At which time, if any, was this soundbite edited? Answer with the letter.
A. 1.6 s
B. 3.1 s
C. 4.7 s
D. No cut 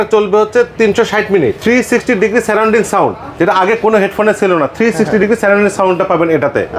A